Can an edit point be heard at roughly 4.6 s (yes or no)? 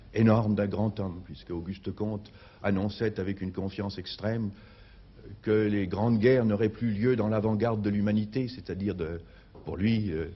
yes